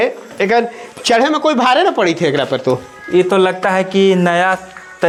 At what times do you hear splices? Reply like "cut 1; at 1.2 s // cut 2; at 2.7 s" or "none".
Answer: none